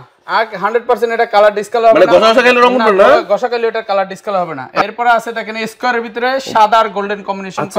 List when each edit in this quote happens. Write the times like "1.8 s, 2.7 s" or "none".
4.8 s